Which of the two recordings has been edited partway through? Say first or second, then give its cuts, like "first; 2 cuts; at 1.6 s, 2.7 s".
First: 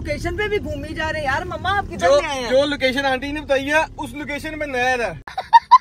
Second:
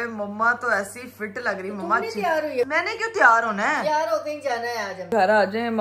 second; 2 cuts; at 2.7 s, 5.1 s